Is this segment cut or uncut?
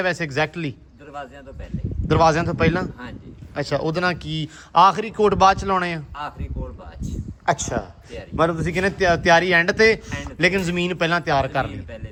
uncut